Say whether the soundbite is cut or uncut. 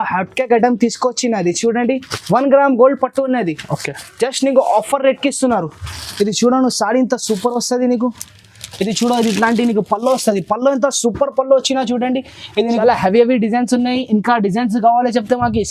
cut